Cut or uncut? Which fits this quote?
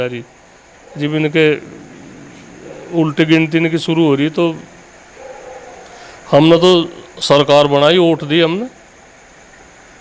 uncut